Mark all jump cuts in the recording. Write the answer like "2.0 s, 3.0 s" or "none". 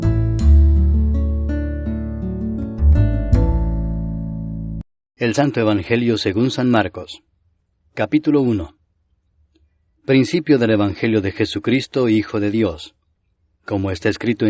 none